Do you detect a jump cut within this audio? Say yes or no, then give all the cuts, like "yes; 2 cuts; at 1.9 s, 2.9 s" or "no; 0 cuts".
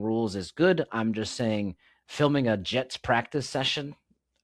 no; 0 cuts